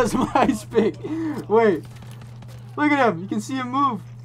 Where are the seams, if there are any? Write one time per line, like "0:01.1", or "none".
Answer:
none